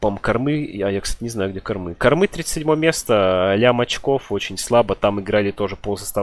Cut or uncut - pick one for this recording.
uncut